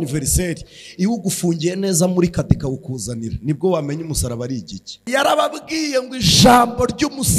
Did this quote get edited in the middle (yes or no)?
yes